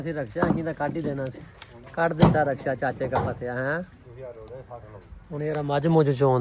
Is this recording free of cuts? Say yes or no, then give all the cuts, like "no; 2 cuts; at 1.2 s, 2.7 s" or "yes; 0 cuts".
yes; 0 cuts